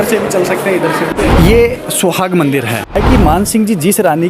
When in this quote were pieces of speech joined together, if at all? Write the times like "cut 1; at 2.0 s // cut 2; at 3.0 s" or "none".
cut 1; at 1.1 s // cut 2; at 3.0 s